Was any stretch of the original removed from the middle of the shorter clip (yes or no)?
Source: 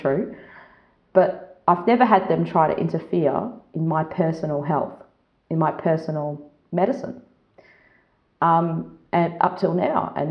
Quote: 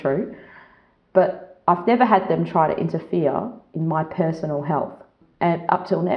yes